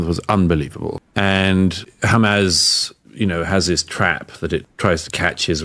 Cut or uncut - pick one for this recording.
cut